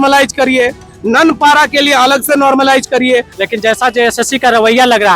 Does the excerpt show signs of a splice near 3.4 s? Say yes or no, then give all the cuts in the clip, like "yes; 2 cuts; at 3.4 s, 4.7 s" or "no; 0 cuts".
yes; 1 cut; at 3.4 s